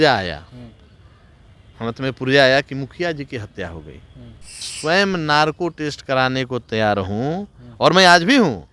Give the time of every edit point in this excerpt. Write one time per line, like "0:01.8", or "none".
0:04.7